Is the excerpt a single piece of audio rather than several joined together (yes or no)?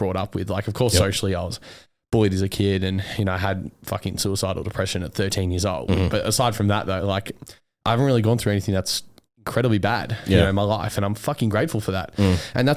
yes